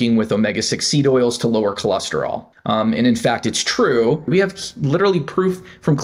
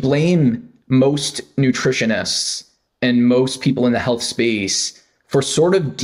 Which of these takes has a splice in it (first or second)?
first